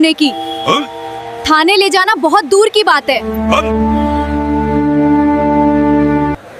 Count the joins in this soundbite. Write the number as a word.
zero